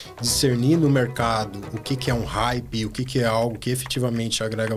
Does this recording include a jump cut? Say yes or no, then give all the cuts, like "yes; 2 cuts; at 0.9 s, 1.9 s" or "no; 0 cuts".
no; 0 cuts